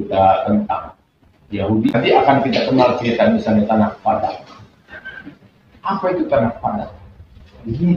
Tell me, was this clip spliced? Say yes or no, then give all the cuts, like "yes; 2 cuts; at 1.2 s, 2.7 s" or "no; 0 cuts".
yes; 1 cut; at 1.9 s